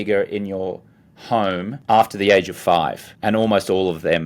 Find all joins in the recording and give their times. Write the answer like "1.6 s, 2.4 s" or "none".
1.7 s, 3.1 s